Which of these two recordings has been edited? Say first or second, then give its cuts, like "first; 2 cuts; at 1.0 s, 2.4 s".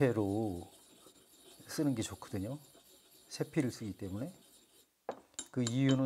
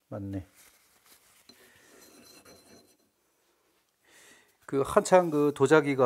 second; 1 cut; at 2.9 s